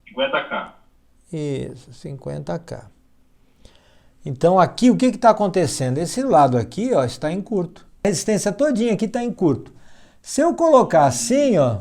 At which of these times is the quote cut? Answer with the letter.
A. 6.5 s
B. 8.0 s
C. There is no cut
B